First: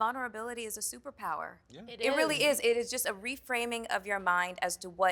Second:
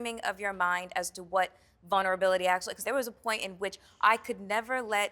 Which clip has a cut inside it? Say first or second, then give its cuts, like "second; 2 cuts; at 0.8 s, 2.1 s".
second; 1 cut; at 2.8 s